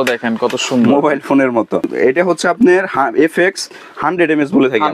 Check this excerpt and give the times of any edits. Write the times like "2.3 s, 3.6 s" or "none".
1.8 s